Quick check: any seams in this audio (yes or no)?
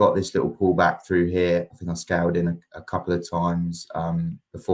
no